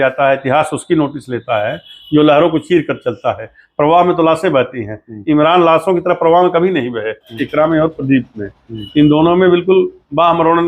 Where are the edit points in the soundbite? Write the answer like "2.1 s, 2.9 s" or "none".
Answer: 7.3 s